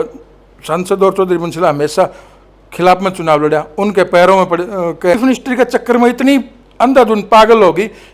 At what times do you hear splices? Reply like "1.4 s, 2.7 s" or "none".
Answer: 5.1 s